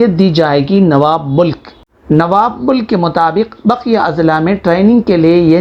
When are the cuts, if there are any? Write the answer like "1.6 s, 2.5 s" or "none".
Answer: none